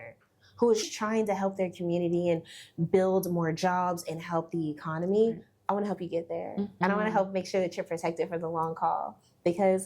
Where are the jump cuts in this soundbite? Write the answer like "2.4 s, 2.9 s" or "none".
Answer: 0.9 s, 6.7 s